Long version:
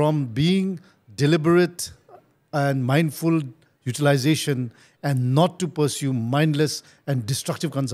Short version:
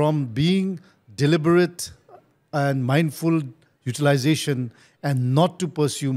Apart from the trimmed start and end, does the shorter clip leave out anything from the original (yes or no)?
no